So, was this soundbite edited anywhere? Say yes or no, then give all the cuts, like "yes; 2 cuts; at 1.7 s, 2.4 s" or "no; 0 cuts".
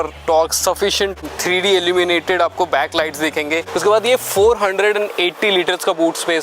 yes; 2 cuts; at 1.2 s, 3.7 s